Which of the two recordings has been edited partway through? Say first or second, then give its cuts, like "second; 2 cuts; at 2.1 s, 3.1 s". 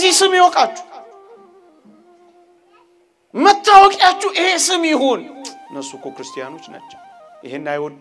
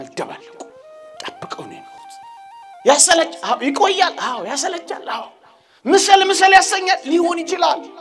first; 2 cuts; at 1.1 s, 3.2 s